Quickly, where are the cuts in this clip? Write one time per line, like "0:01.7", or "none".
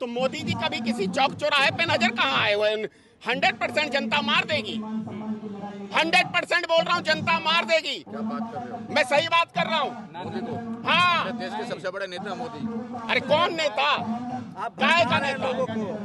none

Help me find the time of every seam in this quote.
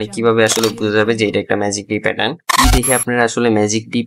0:02.5

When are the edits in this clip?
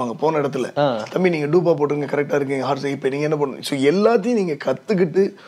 none

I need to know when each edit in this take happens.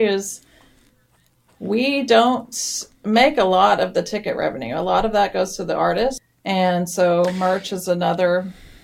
0:06.3

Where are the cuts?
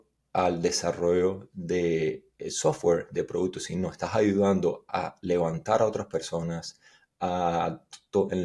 none

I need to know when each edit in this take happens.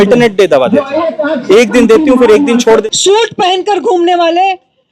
0:02.8

